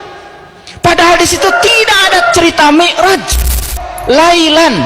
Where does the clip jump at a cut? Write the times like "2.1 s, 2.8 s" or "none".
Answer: 3.6 s